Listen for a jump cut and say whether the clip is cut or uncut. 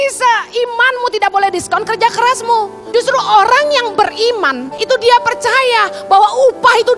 cut